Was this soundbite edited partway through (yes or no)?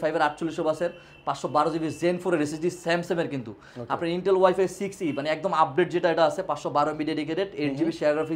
no